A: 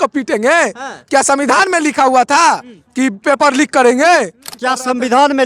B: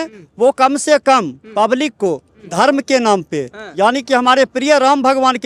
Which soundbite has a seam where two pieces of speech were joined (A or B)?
A